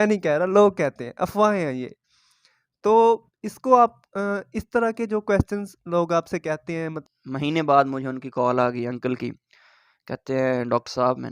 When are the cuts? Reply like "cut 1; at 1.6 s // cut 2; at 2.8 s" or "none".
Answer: cut 1; at 7.1 s